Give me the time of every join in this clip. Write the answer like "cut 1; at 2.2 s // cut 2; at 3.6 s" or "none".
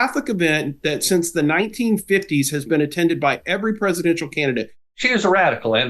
cut 1; at 4.9 s